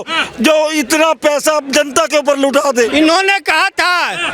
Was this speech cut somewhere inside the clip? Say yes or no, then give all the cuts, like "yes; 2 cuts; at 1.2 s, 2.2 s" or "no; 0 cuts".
yes; 1 cut; at 2.9 s